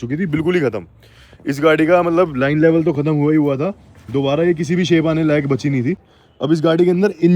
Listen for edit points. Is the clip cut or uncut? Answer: cut